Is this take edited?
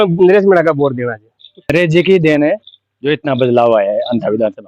yes; 1 cut; at 1.7 s

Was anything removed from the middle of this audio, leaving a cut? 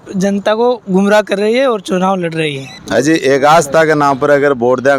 yes; 1 cut; at 2.7 s

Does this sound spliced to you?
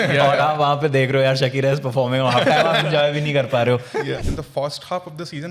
yes; 1 cut; at 4.2 s

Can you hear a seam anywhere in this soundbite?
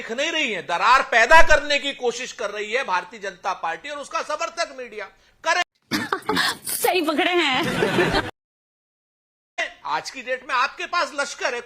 no; 0 cuts

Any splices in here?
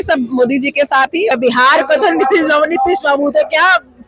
yes; 1 cut; at 1.3 s

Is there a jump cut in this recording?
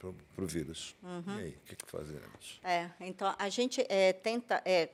no; 0 cuts

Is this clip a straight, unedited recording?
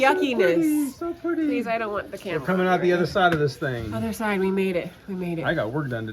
yes; 0 cuts

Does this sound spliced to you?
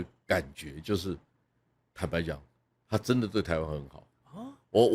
no; 0 cuts

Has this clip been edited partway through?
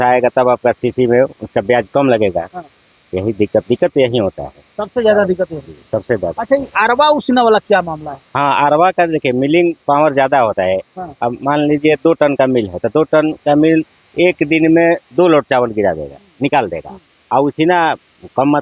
no; 0 cuts

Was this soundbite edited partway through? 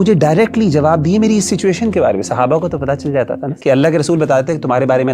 yes; 1 cut; at 3.5 s

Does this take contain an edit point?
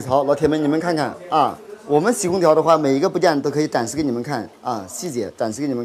no; 0 cuts

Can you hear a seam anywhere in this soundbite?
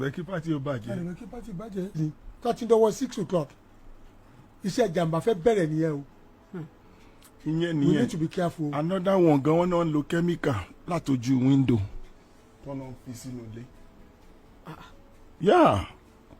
yes; 1 cut; at 1.9 s

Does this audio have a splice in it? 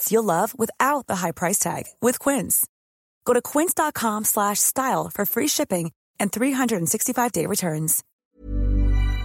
yes; 1 cut; at 8.0 s

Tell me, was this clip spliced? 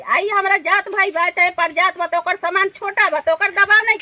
no; 0 cuts

